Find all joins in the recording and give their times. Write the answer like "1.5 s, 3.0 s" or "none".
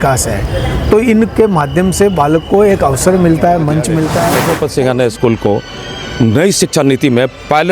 4.3 s